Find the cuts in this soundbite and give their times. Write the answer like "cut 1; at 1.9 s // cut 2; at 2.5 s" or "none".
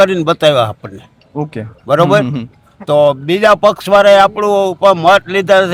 none